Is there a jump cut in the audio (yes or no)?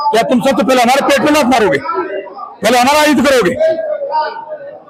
no